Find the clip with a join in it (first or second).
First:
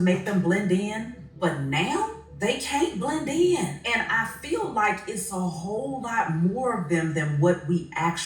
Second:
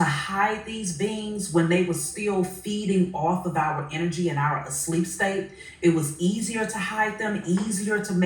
first